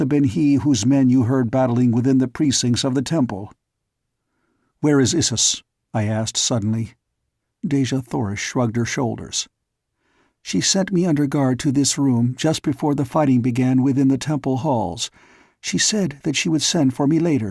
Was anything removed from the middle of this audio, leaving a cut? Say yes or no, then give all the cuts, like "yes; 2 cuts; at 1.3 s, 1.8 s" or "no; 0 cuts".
no; 0 cuts